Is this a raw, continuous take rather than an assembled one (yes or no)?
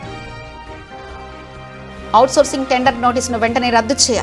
yes